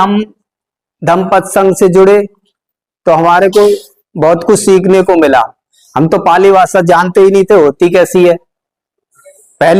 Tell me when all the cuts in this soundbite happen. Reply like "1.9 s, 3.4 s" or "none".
none